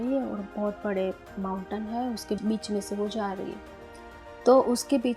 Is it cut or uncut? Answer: cut